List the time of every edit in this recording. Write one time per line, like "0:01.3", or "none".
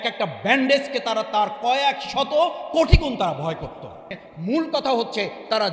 0:04.2